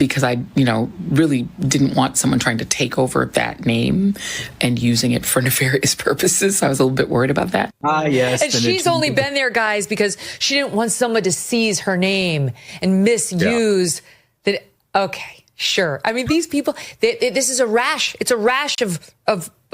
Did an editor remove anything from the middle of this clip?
yes; 1 cut; at 7.8 s

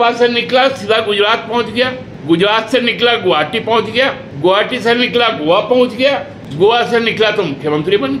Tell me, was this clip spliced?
yes; 3 cuts; at 2.1 s, 4.3 s, 6.4 s

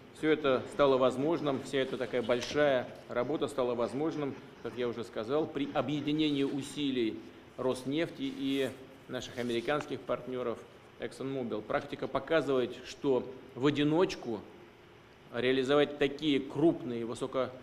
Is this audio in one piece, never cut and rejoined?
no; 1 cut; at 3.3 s

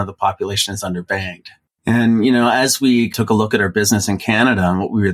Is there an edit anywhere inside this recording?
yes; 2 cuts; at 1.6 s, 3.1 s

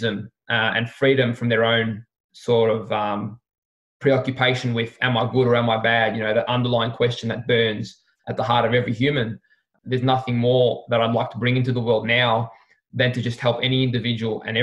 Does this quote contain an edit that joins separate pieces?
no; 0 cuts

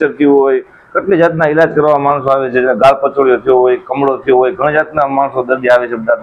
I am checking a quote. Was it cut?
no; 0 cuts

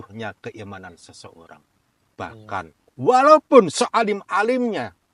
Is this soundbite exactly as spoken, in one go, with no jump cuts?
yes; 0 cuts

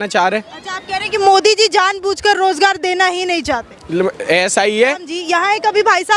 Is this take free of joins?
no; 1 cut; at 5.1 s

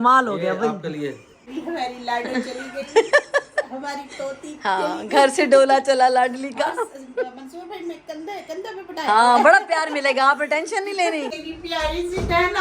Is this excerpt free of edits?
no; 2 cuts; at 1.4 s, 11.4 s

